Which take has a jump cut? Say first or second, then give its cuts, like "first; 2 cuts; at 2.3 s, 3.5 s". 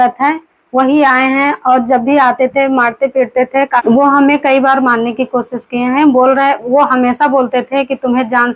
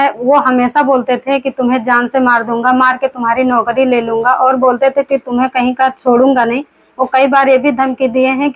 first; 1 cut; at 3.8 s